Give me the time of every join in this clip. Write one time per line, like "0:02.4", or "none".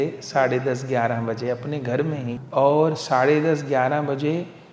0:02.4